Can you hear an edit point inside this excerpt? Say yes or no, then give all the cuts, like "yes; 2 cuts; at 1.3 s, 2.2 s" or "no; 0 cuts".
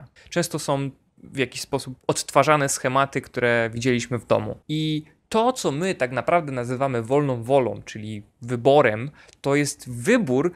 yes; 1 cut; at 4.6 s